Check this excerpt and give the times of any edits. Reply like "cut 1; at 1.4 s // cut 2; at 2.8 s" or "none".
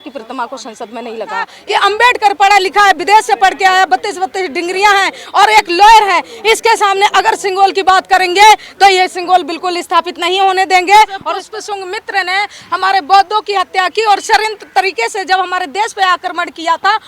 cut 1; at 1.6 s // cut 2; at 11.3 s